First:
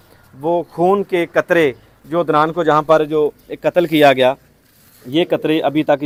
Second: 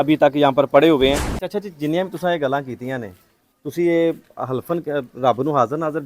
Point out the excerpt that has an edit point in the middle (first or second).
second